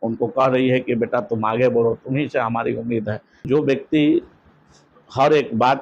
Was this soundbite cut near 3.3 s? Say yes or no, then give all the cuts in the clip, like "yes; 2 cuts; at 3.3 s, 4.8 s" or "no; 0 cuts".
yes; 1 cut; at 3.3 s